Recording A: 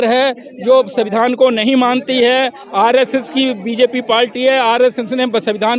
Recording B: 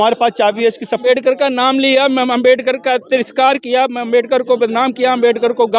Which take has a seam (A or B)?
B